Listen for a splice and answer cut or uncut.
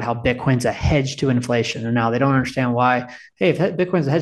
uncut